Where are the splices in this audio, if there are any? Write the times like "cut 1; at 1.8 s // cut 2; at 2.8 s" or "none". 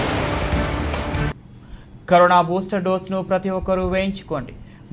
cut 1; at 1.2 s